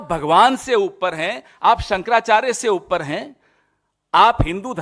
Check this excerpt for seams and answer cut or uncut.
uncut